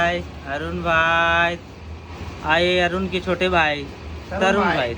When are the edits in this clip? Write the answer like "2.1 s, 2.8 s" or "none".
none